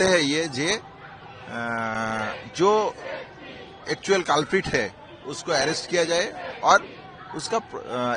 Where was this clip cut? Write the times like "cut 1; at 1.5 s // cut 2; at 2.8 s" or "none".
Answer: none